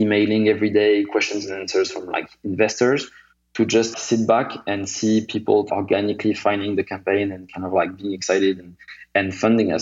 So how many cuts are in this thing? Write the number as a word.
two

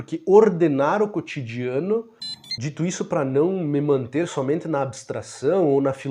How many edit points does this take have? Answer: one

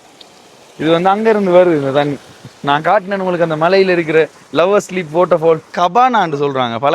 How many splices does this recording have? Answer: one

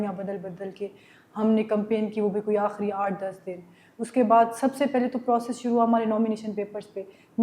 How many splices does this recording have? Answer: zero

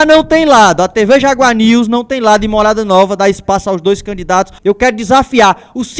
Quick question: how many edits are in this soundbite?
one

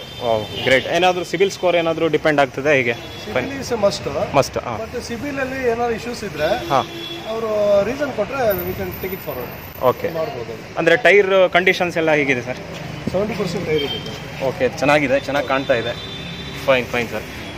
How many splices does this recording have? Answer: zero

